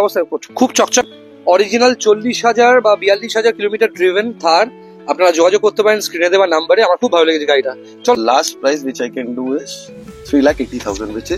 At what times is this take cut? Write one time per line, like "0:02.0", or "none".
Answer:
0:01.1
0:08.1